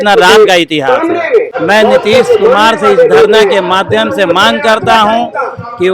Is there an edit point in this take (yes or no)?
yes